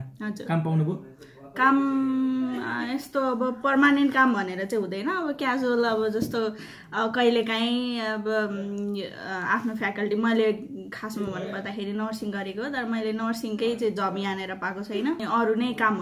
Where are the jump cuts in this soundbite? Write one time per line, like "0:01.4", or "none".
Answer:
none